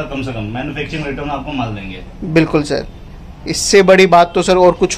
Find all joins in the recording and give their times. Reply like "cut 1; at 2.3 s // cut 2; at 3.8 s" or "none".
none